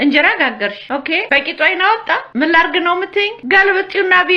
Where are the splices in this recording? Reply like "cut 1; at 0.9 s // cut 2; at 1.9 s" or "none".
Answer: cut 1; at 1.1 s // cut 2; at 2.3 s // cut 3; at 3.4 s